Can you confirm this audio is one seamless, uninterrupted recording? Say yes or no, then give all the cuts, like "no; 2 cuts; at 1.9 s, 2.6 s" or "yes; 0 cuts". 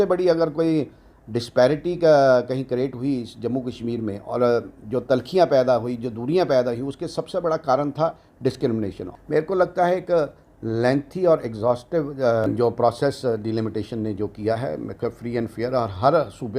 no; 2 cuts; at 9.0 s, 12.5 s